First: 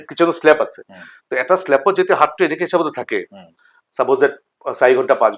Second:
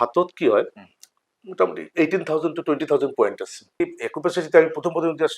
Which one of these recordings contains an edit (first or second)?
second